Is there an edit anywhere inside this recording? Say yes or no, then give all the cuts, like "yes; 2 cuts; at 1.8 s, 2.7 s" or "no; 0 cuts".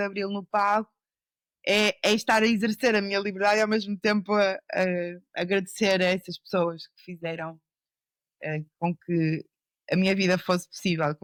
no; 0 cuts